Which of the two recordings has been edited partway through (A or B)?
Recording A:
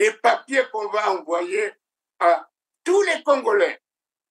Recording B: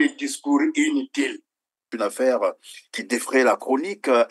B